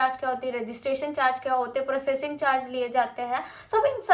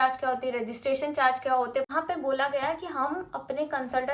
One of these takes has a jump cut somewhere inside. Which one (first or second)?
second